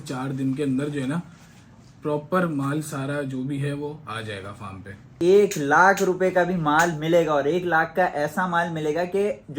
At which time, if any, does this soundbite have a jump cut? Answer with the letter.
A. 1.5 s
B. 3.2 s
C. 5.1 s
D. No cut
C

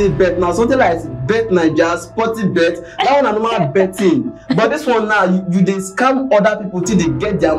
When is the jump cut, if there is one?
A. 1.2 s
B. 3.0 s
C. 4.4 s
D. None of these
D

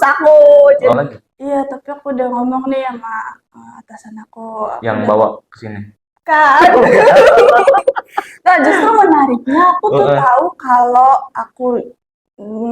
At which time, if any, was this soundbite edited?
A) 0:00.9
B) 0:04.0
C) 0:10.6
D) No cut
A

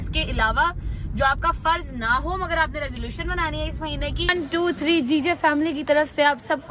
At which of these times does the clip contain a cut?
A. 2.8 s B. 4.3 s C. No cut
B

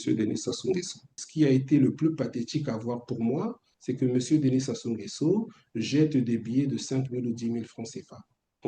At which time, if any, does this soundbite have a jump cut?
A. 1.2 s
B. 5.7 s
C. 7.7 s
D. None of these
A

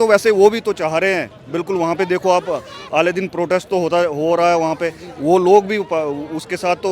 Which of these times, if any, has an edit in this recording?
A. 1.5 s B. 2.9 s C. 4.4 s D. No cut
D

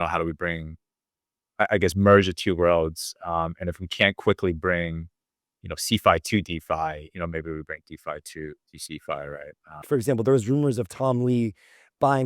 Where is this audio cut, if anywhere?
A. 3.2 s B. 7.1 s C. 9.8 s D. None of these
C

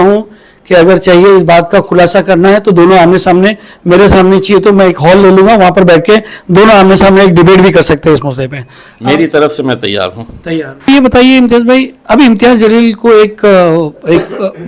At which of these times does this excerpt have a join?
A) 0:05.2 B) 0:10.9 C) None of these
B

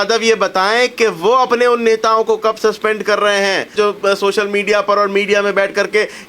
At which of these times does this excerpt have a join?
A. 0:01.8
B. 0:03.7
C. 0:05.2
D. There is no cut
B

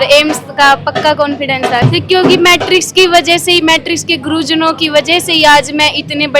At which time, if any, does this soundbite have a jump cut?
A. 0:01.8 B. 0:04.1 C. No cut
A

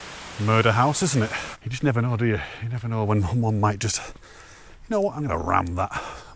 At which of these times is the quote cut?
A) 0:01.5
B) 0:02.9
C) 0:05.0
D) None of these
A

